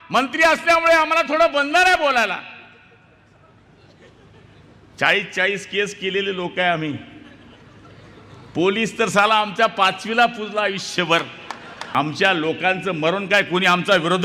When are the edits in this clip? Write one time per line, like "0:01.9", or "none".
0:11.9